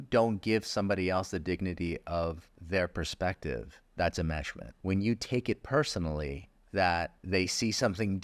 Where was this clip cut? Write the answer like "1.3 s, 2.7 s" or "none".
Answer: 2.5 s, 3.8 s, 4.6 s, 6.5 s, 7.2 s